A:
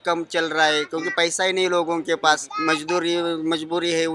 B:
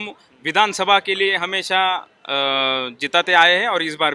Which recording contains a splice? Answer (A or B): A